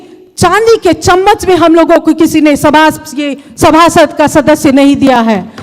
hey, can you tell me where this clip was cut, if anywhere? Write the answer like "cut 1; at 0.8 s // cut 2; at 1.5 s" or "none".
none